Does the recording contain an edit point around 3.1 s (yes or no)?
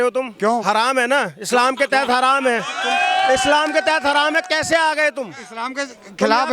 no